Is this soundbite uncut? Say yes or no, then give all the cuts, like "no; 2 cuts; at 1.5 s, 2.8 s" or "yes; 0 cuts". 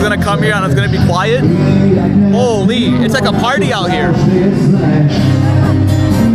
yes; 0 cuts